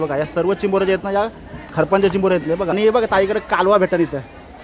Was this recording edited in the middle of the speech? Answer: yes; 1 cut; at 2.7 s

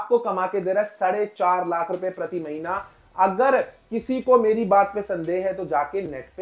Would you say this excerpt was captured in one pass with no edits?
yes; 0 cuts

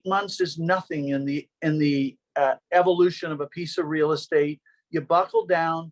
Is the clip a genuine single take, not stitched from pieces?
yes; 0 cuts

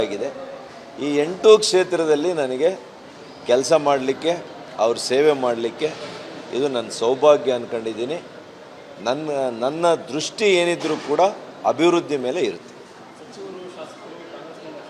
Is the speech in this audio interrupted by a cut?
yes; 1 cut; at 6.6 s

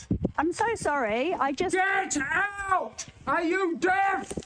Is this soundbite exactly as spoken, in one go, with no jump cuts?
no; 1 cut; at 3.0 s

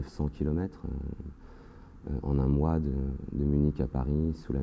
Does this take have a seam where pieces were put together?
no; 0 cuts

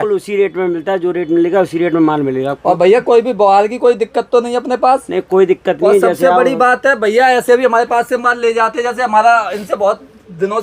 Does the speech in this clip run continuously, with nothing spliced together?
yes; 0 cuts

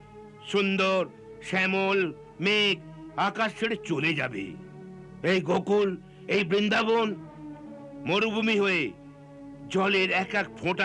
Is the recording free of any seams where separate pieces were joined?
yes; 0 cuts

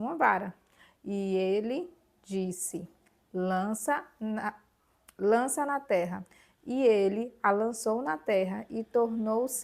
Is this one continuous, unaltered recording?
yes; 0 cuts

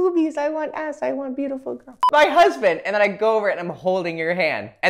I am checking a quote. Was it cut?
yes; 1 cut; at 2.0 s

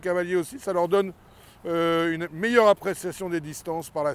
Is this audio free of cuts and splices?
yes; 0 cuts

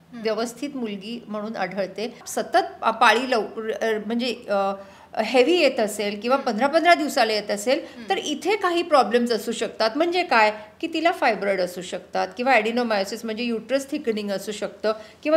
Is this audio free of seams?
no; 1 cut; at 2.2 s

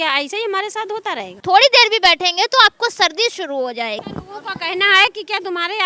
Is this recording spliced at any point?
yes; 2 cuts; at 1.4 s, 3.9 s

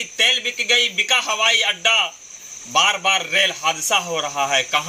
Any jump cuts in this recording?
no; 0 cuts

